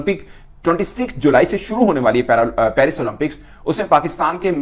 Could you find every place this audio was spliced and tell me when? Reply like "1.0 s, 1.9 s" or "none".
none